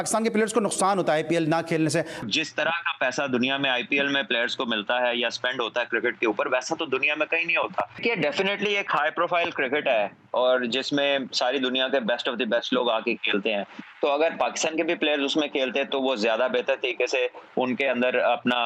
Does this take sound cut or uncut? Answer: cut